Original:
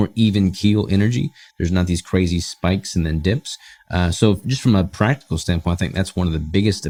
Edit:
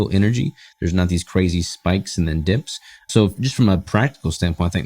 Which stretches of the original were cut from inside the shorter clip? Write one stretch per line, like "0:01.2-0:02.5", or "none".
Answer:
0:03.9-0:04.1